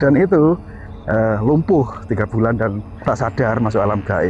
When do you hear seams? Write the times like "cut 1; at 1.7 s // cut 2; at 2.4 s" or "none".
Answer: cut 1; at 2.9 s